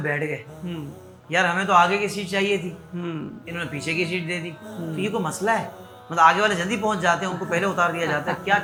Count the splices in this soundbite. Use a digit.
0